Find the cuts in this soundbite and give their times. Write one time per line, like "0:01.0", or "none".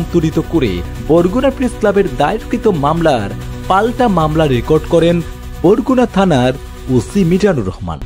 0:00.9

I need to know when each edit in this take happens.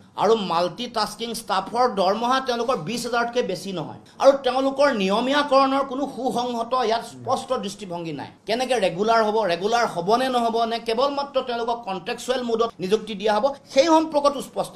0:04.0

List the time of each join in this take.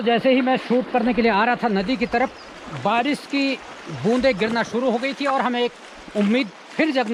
none

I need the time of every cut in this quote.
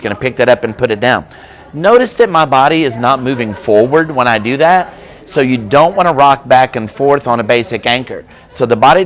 none

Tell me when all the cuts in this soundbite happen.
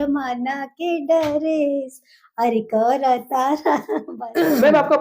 0:03.9

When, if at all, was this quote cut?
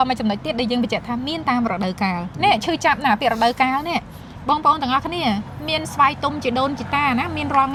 none

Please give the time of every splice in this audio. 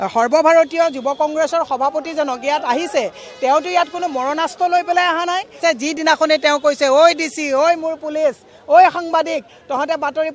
0:05.5

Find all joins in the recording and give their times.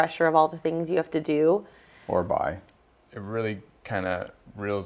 0:02.7

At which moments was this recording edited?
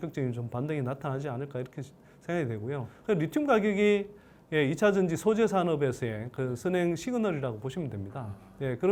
none

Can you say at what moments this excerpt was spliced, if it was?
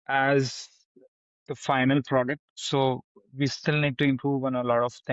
0:02.5

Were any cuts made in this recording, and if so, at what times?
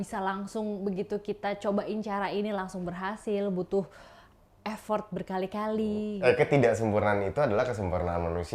0:06.1

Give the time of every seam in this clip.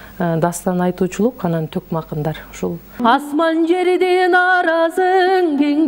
0:03.0

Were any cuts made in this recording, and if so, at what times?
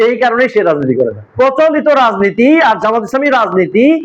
0:01.2

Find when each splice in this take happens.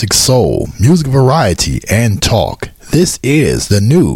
none

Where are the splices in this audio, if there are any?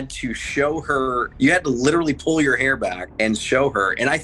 0:01.3
0:03.0

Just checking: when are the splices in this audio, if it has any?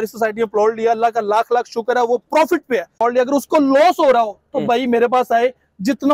0:02.9

